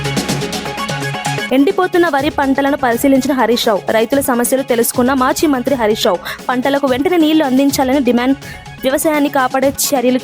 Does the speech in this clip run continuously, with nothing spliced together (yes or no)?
no